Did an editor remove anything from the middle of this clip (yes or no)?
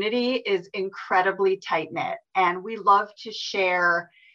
no